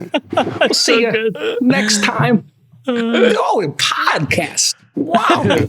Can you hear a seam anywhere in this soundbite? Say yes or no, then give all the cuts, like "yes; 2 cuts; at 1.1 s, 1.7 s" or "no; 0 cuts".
no; 0 cuts